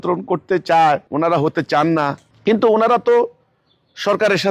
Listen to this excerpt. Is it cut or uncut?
cut